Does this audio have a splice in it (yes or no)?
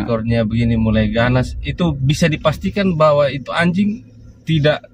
no